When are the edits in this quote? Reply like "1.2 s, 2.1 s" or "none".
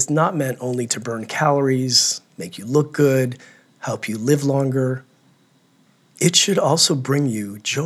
none